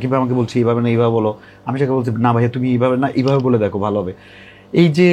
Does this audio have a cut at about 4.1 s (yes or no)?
no